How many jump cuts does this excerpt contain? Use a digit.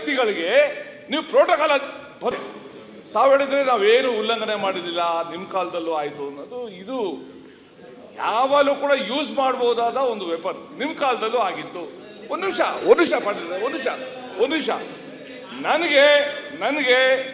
1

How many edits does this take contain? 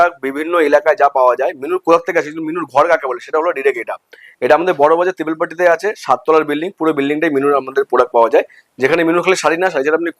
0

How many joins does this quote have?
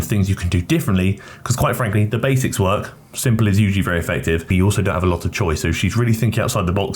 1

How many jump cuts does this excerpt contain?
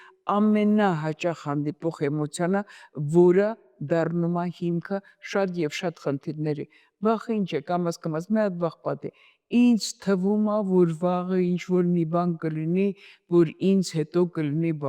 0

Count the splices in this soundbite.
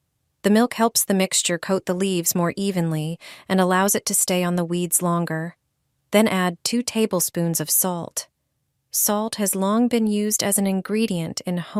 0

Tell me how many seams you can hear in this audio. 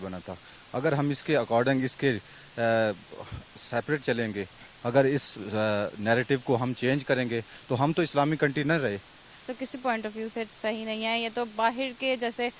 1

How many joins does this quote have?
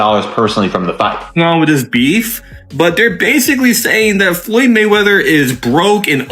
1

